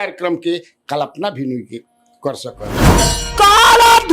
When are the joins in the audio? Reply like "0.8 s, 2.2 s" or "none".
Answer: 2.8 s